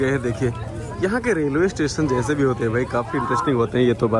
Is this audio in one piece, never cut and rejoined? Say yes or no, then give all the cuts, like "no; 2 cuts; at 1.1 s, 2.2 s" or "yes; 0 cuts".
yes; 0 cuts